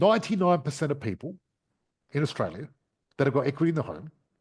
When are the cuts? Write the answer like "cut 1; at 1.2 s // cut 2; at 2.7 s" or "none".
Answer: none